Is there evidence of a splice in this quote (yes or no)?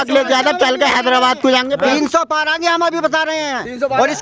no